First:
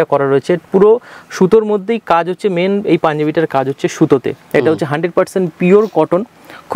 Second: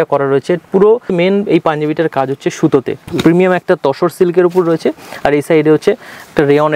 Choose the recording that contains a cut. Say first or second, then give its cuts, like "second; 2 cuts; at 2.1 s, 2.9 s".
second; 2 cuts; at 1.1 s, 3.1 s